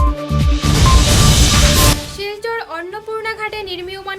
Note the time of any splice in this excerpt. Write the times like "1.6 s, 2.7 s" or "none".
1.9 s